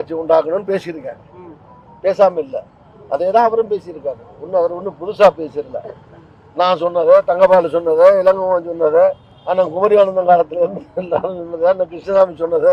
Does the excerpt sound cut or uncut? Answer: uncut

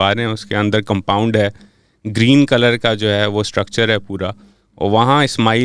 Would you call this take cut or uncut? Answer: uncut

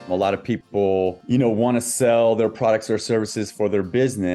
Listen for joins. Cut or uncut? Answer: cut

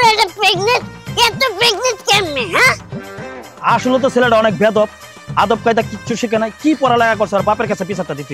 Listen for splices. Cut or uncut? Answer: uncut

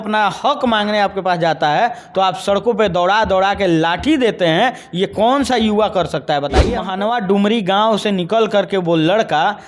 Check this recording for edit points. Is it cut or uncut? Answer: cut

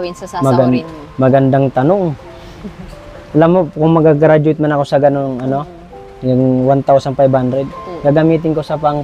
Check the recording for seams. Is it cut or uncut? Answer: uncut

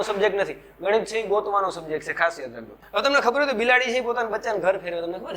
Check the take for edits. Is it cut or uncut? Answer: cut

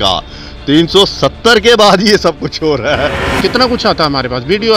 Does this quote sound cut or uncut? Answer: cut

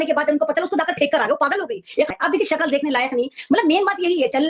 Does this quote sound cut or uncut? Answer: cut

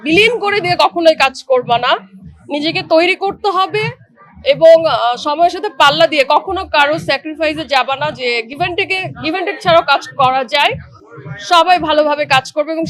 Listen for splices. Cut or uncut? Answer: uncut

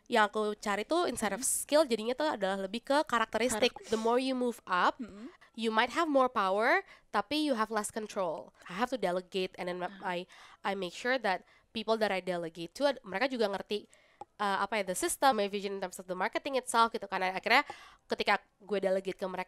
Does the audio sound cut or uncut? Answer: cut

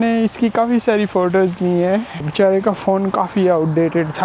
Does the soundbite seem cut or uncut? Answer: cut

